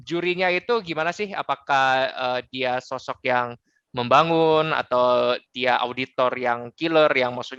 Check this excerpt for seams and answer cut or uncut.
uncut